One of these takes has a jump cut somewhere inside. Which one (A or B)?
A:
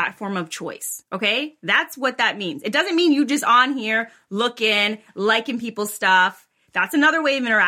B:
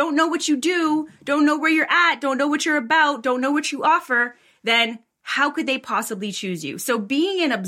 A